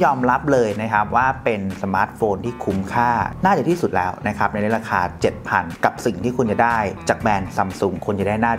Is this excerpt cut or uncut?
uncut